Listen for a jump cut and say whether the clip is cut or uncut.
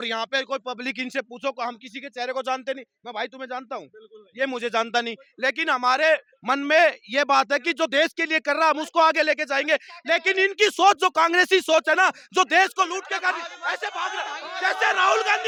uncut